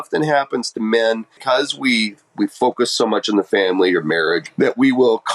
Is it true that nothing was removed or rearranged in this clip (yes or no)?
no